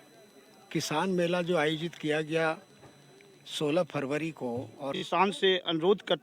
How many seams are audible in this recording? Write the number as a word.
one